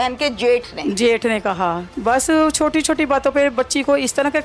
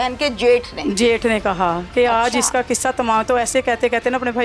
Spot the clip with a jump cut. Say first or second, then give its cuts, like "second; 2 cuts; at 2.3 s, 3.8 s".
first; 1 cut; at 1.8 s